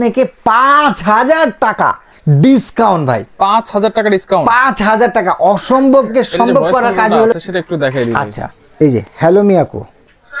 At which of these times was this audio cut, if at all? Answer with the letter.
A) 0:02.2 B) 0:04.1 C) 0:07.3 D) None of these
C